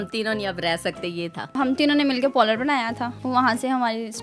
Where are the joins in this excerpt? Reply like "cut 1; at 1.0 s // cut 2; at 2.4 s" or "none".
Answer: cut 1; at 1.6 s // cut 2; at 3.1 s